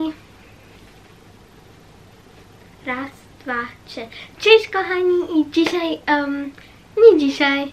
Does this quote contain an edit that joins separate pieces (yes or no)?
no